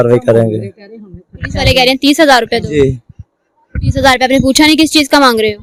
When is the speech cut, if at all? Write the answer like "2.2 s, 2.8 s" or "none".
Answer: none